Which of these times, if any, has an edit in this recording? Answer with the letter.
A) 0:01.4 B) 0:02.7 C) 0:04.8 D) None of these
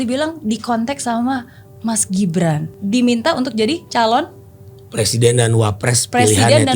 B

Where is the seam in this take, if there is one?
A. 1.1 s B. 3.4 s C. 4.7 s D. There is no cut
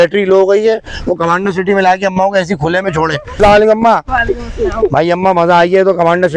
B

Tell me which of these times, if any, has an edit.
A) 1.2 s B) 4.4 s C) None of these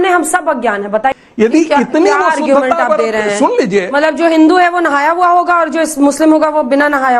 A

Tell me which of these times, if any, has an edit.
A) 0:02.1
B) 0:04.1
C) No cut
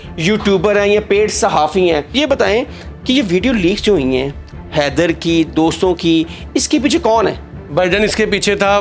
A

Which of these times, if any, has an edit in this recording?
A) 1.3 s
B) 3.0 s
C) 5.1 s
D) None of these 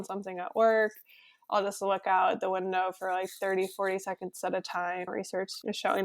C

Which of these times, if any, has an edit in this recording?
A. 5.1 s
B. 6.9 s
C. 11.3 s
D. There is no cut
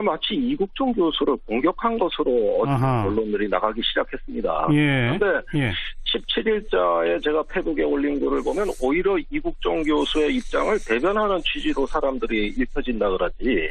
C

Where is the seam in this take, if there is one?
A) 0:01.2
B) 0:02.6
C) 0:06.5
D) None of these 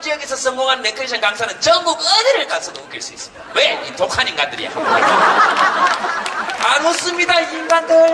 A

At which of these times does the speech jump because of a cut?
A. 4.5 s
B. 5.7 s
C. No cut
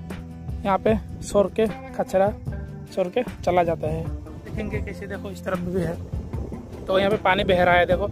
A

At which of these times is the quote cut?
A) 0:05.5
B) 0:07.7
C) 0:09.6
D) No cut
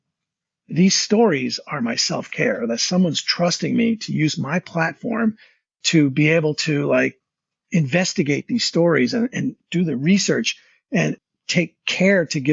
C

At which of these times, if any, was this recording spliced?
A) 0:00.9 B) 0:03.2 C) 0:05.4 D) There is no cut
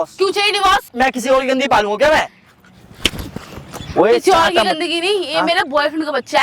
A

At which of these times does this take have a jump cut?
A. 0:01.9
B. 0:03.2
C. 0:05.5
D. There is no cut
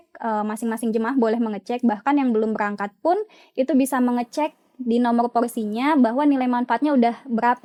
D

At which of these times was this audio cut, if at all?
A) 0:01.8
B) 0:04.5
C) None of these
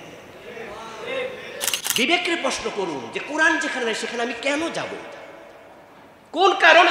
A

